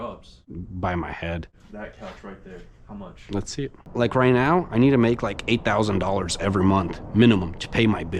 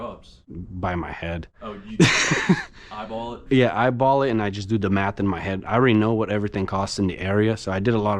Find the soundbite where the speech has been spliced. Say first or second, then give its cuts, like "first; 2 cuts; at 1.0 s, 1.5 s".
first; 2 cuts; at 1.6 s, 3.9 s